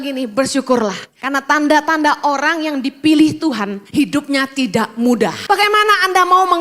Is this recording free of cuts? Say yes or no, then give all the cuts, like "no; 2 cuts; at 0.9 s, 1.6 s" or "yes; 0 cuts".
no; 3 cuts; at 1.1 s, 3.8 s, 5.4 s